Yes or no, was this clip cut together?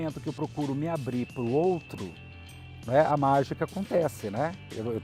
no